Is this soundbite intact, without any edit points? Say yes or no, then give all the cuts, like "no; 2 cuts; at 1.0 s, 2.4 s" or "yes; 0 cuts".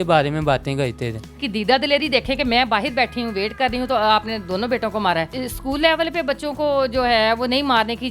no; 2 cuts; at 1.4 s, 5.3 s